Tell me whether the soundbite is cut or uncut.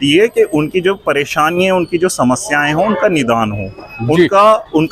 uncut